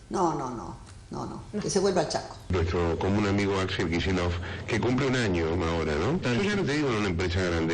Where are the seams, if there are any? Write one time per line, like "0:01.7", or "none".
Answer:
0:02.4
0:06.2